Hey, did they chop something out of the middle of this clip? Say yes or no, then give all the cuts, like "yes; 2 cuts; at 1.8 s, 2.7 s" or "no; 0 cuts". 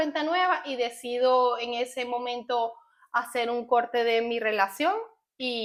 no; 0 cuts